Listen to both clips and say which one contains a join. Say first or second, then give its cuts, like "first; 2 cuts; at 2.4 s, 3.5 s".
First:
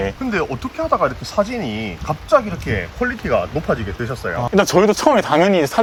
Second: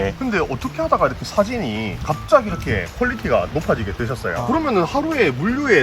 second; 1 cut; at 4.3 s